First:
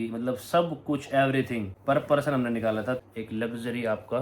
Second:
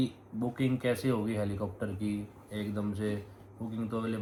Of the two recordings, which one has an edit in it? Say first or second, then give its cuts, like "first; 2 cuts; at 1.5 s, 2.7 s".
first; 2 cuts; at 1.7 s, 3.0 s